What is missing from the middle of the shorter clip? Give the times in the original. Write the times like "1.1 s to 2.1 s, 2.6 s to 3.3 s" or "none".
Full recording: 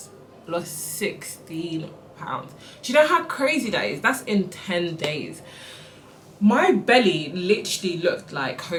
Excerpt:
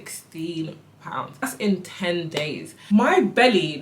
2.6 s to 4.1 s, 5.4 s to 6.2 s